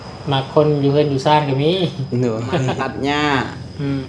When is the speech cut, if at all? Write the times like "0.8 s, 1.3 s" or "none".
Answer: 2.8 s